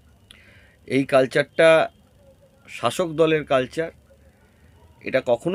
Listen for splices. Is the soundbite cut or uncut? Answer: uncut